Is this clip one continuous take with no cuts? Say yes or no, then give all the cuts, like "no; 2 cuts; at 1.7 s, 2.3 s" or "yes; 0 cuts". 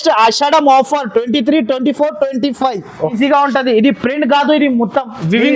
no; 1 cut; at 3.1 s